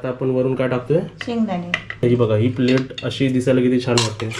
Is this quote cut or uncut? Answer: cut